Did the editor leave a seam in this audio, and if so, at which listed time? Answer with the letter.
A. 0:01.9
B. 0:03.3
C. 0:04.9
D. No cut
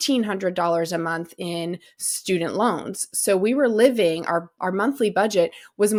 D